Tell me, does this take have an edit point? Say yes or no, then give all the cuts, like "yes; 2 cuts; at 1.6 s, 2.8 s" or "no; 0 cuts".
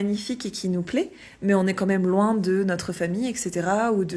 no; 0 cuts